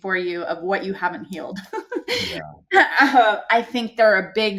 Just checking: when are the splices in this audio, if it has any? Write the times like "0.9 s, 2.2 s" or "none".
none